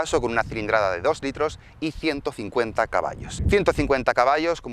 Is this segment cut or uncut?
cut